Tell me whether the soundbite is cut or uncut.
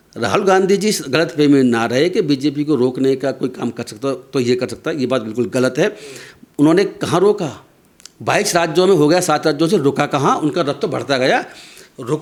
uncut